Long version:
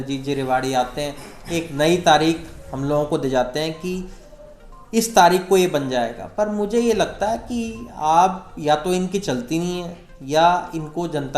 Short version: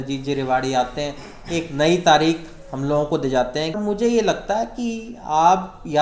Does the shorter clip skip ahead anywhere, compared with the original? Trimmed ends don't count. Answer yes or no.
yes